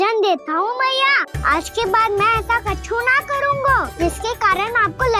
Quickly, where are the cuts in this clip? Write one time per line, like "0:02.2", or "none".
0:01.3
0:03.9